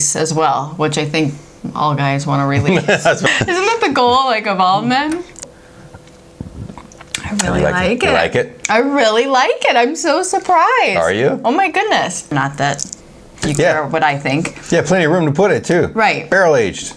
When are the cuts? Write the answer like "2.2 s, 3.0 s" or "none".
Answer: 3.2 s, 5.4 s, 12.3 s